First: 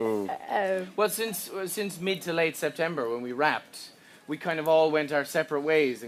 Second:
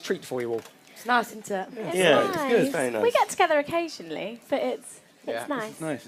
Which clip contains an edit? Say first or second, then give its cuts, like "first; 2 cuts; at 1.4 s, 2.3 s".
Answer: second; 1 cut; at 4.2 s